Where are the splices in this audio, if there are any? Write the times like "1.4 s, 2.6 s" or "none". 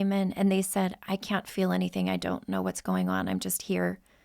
1.0 s